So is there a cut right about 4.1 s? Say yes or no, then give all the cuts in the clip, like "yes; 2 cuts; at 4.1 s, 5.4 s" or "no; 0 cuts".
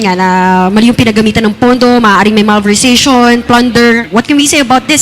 yes; 1 cut; at 4.1 s